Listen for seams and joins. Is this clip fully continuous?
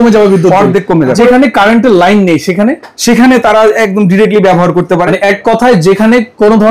no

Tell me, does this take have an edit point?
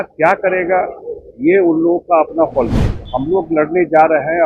yes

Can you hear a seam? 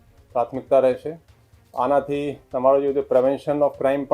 no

